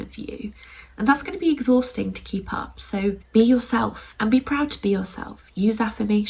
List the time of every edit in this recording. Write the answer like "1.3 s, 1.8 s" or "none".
3.2 s